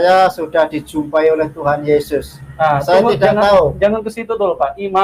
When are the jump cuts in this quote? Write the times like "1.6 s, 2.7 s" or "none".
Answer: none